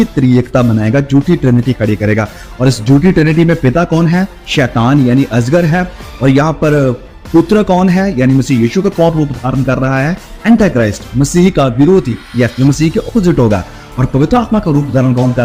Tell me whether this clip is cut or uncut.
uncut